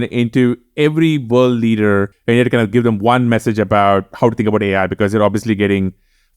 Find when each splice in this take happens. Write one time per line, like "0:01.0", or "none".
0:02.1